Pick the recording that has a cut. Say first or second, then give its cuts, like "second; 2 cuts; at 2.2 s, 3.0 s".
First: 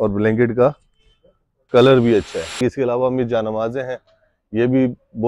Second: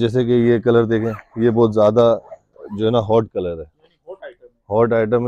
first; 1 cut; at 2.6 s